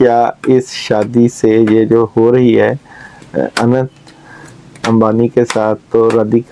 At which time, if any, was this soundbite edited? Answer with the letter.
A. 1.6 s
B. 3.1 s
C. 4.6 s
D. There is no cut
D